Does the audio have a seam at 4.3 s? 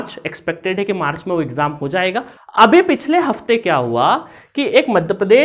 no; 1 cut; at 2.3 s

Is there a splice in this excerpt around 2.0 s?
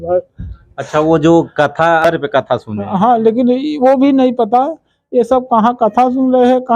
yes; 1 cut; at 2.0 s

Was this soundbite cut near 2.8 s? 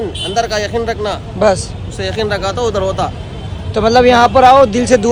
no; 0 cuts

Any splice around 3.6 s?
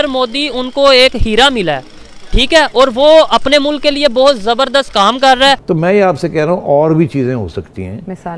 no; 1 cut; at 5.6 s

